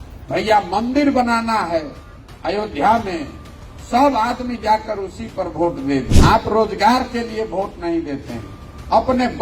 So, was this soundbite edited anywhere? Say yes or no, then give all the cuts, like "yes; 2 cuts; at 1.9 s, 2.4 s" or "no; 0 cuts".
yes; 1 cut; at 6.1 s